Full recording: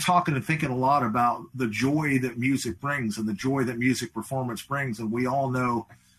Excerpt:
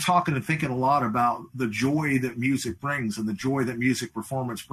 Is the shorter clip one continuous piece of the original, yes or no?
yes